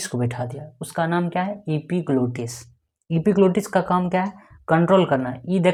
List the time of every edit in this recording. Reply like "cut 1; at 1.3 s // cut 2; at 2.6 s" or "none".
none

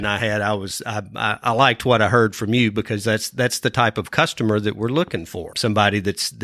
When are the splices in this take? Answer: cut 1; at 5.5 s

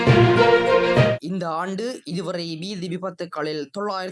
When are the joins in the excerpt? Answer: cut 1; at 1.2 s

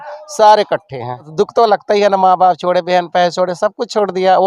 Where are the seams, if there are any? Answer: cut 1; at 1.3 s

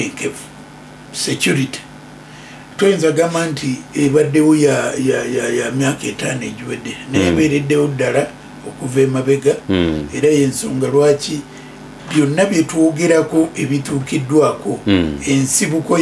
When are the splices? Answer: none

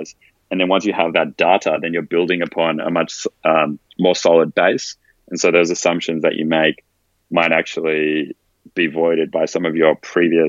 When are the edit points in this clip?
none

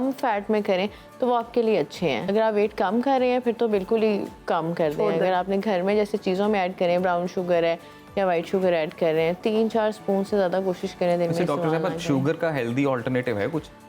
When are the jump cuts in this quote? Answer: cut 1; at 2.2 s

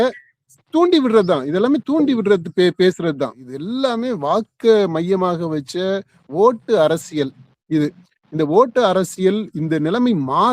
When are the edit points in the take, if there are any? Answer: cut 1; at 3.5 s

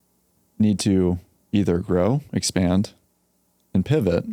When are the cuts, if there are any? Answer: none

